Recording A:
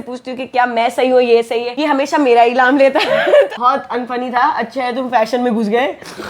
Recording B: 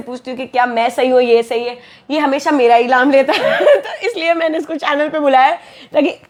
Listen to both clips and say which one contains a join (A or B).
A